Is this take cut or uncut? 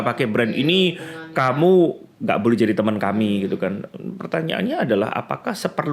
uncut